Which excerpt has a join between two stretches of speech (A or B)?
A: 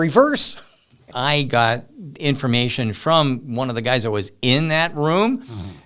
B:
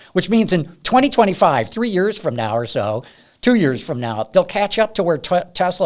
A